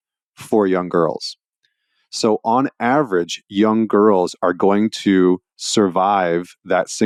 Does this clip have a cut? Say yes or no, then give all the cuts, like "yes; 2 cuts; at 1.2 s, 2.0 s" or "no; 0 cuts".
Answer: no; 0 cuts